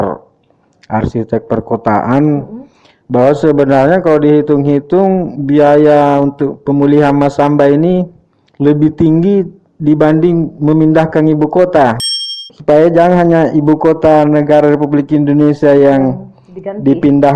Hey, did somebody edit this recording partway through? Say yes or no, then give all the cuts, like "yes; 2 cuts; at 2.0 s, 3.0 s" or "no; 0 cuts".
yes; 1 cut; at 12.1 s